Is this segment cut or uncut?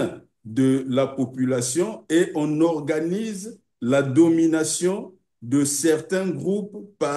uncut